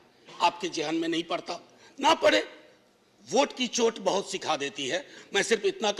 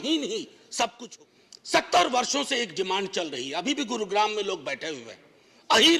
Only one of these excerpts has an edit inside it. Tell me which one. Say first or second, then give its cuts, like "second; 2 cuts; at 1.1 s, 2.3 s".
second; 1 cut; at 1.0 s